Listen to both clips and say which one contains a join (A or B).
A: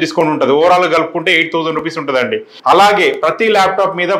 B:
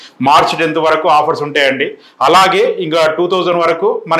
A